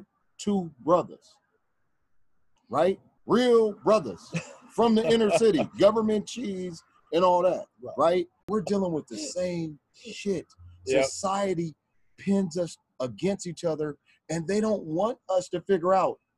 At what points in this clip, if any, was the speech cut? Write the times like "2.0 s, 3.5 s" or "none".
8.5 s